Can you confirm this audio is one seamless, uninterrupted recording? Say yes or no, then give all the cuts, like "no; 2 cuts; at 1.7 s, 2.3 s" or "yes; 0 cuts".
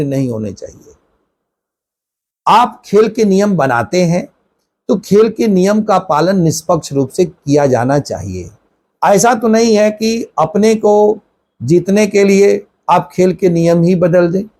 yes; 0 cuts